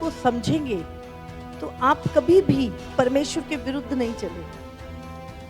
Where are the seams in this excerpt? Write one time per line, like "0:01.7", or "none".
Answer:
0:02.8